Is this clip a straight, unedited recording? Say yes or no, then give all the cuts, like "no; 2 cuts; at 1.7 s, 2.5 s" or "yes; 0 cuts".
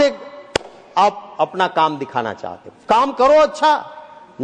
yes; 0 cuts